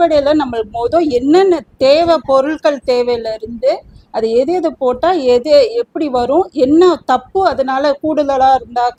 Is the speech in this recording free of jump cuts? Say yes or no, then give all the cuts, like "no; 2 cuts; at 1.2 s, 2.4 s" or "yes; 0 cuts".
yes; 0 cuts